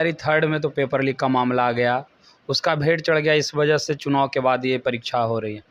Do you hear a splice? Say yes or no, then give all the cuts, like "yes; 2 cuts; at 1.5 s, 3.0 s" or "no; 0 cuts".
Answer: no; 0 cuts